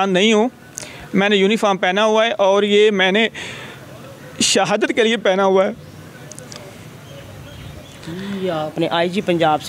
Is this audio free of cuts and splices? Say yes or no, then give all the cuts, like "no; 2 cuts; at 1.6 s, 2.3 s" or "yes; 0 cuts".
no; 1 cut; at 8.7 s